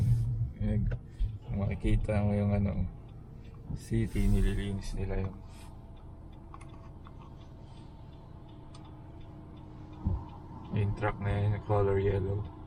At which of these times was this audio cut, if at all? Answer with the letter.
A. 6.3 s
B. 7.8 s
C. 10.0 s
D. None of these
D